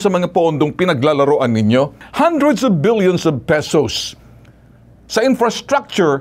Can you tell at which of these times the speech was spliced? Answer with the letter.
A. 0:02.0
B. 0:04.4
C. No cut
A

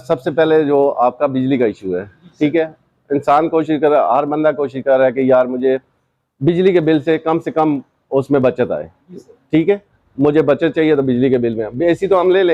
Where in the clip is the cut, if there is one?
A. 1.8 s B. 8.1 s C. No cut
C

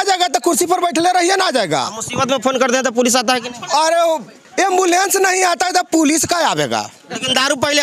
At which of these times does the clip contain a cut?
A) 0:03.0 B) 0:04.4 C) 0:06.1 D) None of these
B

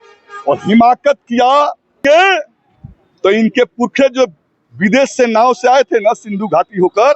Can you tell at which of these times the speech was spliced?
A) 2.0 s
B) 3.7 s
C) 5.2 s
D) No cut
A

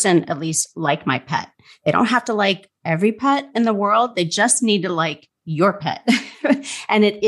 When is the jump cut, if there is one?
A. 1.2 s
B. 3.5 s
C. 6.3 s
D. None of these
D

